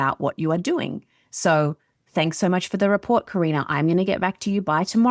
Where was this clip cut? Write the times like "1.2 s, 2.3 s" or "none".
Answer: none